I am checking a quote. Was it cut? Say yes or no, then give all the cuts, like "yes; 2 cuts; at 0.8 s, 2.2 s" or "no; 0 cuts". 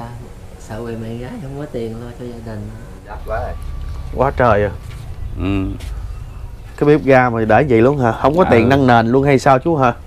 yes; 1 cut; at 3.2 s